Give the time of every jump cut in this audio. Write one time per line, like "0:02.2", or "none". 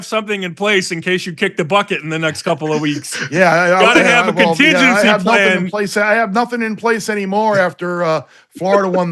none